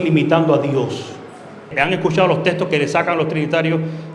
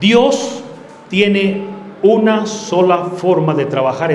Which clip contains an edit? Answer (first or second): first